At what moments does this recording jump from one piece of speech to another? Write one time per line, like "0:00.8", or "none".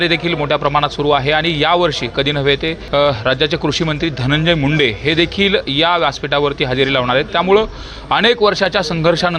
0:02.8